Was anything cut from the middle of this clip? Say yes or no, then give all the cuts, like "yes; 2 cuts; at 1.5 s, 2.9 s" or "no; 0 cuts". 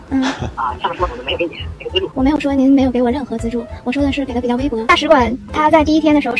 yes; 2 cuts; at 2.1 s, 4.8 s